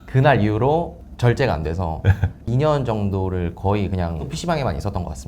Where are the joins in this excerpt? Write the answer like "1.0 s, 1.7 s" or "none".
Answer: 1.0 s, 2.4 s, 4.3 s